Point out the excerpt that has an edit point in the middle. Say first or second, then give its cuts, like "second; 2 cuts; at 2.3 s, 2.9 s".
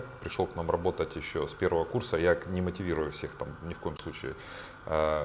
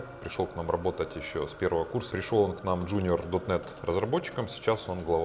second; 1 cut; at 2.0 s